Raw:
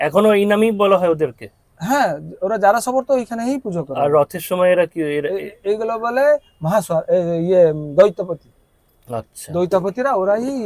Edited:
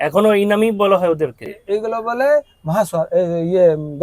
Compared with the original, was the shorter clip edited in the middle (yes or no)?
yes